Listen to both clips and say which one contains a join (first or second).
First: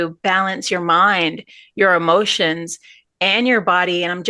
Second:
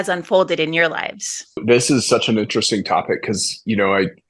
second